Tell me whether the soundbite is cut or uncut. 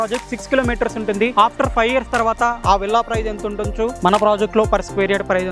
uncut